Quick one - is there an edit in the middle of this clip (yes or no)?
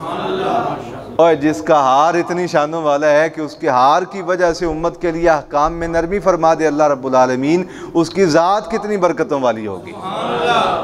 no